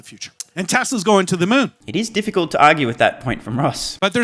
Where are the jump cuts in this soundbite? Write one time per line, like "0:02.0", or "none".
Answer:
none